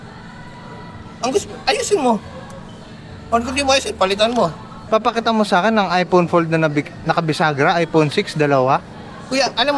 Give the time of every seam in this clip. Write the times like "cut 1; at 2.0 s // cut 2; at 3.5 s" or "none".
cut 1; at 4.8 s